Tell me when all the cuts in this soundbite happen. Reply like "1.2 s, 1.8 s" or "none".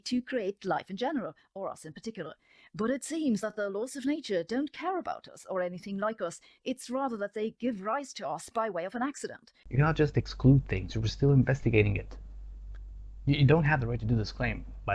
9.7 s